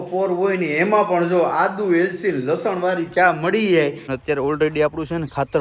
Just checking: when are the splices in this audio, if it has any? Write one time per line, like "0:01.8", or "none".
0:04.1

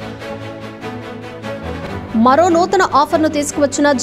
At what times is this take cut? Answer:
none

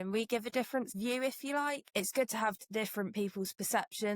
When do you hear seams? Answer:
0:00.9
0:01.9

